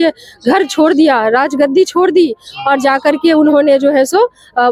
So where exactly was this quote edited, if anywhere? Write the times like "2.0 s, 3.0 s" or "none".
none